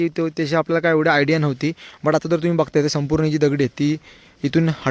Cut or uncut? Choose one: uncut